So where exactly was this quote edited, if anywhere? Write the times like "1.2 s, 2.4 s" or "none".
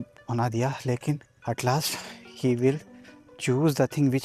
1.3 s

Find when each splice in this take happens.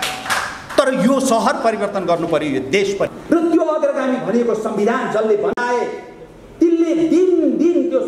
3.1 s

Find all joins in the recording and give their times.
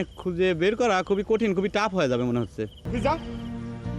2.8 s

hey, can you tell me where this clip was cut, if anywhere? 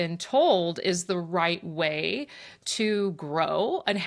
none

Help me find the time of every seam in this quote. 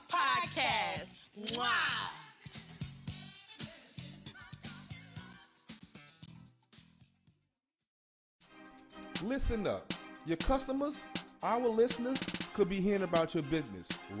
none

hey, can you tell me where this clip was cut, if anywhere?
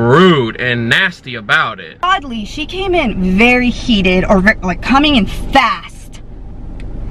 1.9 s

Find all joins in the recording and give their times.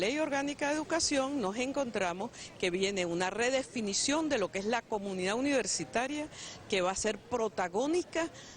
7.3 s

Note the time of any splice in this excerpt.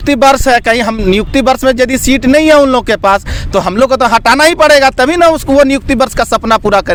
none

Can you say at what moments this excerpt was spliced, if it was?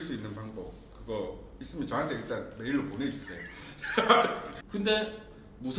4.5 s

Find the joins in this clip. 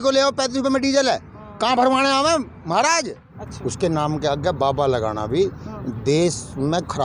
3.4 s

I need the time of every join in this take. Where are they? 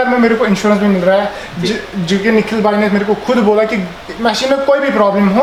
none

